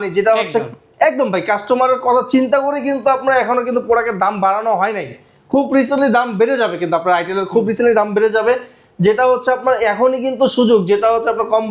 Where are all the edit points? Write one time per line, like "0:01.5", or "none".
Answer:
none

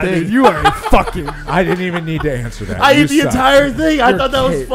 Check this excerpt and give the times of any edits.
0:01.3

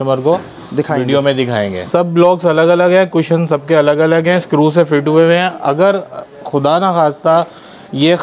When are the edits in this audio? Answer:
0:01.8

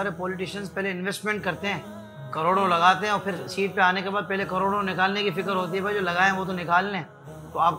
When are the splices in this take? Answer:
none

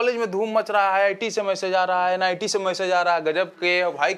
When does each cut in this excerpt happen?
none

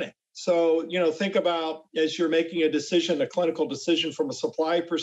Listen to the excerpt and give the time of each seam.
none

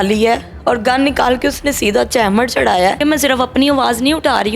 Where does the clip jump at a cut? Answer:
0:03.0

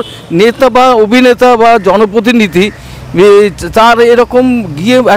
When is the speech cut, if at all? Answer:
none

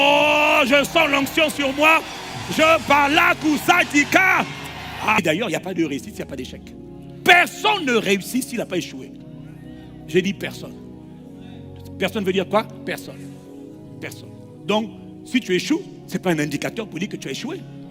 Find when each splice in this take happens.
0:05.2

